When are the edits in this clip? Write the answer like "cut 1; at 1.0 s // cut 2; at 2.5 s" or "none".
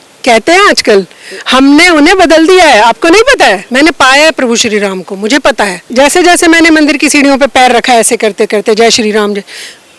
cut 1; at 3.6 s // cut 2; at 5.9 s

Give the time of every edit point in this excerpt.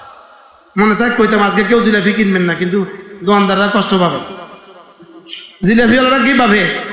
none

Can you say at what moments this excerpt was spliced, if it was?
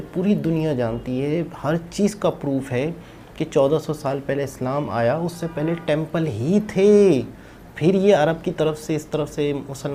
none

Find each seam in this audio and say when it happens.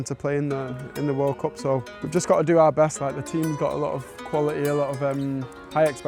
cut 1; at 2.0 s

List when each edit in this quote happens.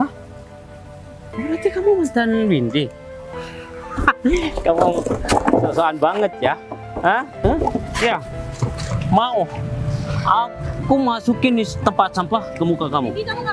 cut 1; at 7.3 s

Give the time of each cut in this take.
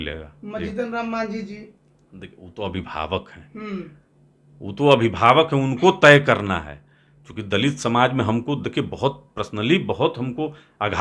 none

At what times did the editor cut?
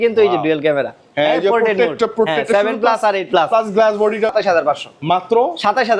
cut 1; at 4.3 s

